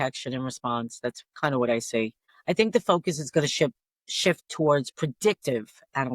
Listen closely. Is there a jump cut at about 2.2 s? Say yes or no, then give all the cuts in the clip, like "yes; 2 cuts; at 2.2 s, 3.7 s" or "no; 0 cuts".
yes; 1 cut; at 2.2 s